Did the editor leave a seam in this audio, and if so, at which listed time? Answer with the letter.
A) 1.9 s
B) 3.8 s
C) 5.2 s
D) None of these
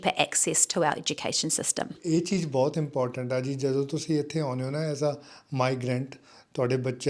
A